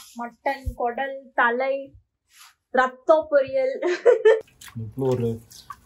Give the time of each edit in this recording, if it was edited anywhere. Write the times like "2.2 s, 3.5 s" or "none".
4.4 s